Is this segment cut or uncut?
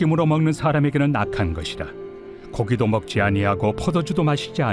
cut